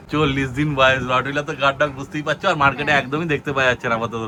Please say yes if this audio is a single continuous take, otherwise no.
yes